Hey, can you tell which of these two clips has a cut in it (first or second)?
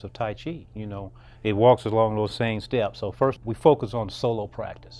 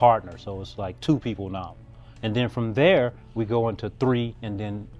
first